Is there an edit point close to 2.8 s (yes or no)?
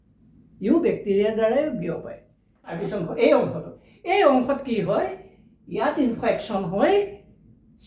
yes